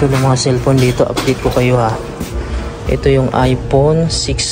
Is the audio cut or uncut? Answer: uncut